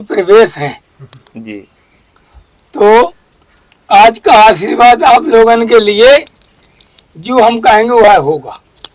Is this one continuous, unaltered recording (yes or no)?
yes